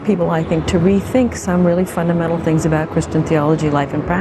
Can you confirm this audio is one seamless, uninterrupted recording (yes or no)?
yes